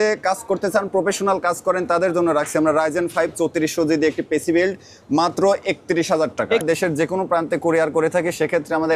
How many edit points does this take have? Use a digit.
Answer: 1